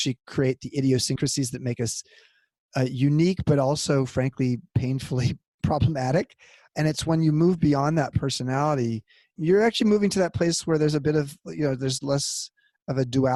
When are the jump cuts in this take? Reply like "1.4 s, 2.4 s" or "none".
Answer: none